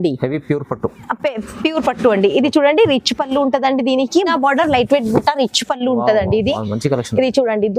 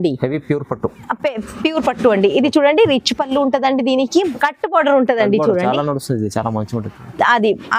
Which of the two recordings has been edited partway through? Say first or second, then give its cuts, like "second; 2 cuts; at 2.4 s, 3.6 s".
first; 1 cut; at 4.3 s